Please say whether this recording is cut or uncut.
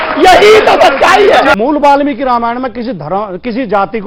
cut